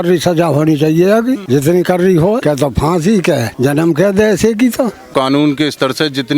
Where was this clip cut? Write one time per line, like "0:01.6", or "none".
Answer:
0:01.4
0:02.4
0:03.5
0:05.1